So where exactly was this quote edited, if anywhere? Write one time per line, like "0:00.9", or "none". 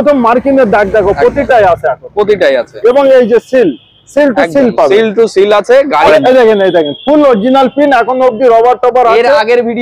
0:06.2